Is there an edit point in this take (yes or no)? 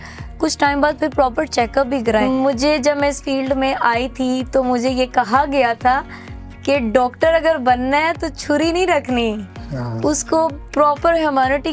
yes